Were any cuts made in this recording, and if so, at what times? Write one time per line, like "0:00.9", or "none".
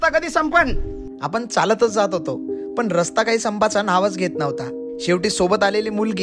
none